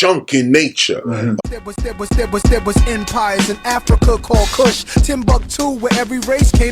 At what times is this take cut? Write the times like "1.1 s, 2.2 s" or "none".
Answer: 1.4 s